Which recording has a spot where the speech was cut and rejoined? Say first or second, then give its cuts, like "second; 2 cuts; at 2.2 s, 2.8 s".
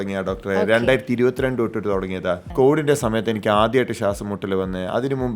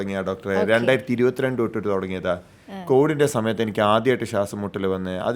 first; 1 cut; at 2.4 s